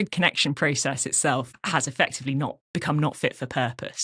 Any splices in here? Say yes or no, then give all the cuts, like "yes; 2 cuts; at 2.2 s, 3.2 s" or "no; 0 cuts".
yes; 1 cut; at 1.5 s